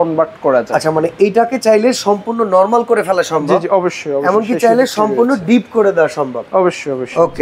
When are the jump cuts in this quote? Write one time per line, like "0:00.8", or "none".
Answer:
none